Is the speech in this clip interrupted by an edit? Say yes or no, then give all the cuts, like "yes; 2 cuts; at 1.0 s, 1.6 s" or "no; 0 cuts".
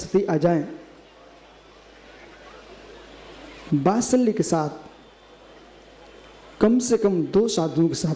no; 0 cuts